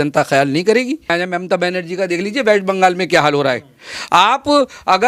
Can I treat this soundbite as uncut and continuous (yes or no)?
no